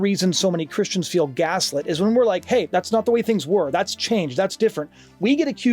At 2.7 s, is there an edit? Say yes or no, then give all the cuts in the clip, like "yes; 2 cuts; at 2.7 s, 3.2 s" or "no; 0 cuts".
yes; 1 cut; at 2.7 s